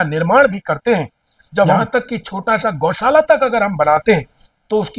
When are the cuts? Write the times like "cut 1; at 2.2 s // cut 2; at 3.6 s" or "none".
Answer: cut 1; at 1.8 s